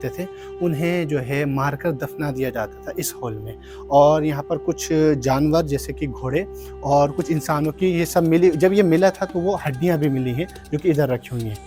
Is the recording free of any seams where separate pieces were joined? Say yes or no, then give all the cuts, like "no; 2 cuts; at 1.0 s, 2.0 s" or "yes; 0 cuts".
yes; 0 cuts